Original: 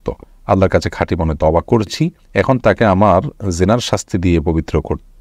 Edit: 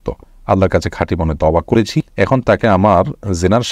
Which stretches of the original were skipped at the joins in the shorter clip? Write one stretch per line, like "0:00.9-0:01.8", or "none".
0:01.9-0:02.0